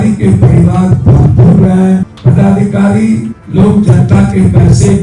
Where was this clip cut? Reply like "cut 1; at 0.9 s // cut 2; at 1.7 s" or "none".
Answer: cut 1; at 2.1 s // cut 2; at 3.4 s